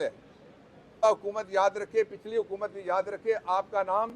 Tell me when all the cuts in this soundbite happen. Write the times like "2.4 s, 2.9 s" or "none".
1.0 s